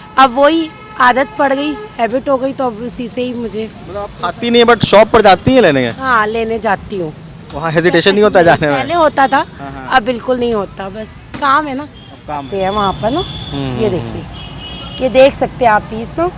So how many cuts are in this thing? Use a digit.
1